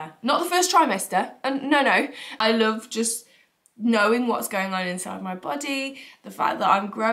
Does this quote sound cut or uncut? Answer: cut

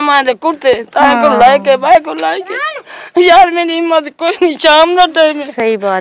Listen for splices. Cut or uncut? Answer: uncut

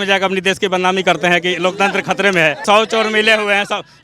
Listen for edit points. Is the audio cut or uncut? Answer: cut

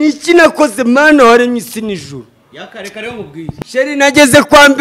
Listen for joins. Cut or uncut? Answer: cut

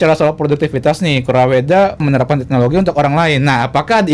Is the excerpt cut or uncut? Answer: cut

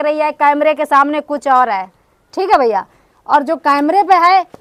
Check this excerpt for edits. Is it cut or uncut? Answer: uncut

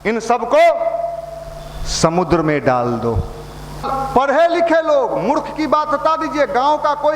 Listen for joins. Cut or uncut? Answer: cut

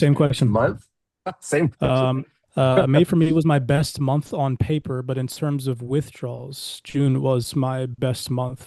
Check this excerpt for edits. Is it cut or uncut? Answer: cut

